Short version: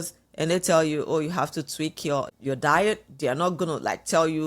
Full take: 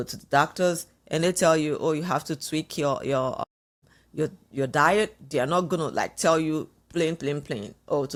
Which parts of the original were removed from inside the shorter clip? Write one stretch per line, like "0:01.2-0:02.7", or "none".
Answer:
0:03.0-0:04.4